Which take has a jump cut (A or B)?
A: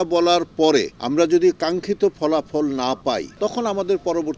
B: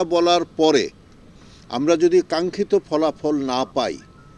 A